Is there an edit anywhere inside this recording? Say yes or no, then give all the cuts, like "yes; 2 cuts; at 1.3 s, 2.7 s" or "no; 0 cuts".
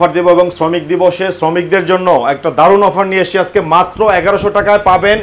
no; 0 cuts